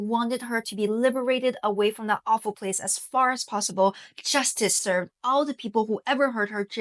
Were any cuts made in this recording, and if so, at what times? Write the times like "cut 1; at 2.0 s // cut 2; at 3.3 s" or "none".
none